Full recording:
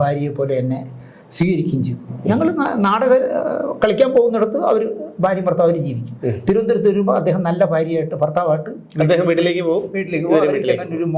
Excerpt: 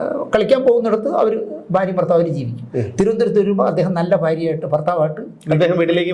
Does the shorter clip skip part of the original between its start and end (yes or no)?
no